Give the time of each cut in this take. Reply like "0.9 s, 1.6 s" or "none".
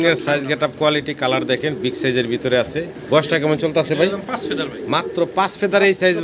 none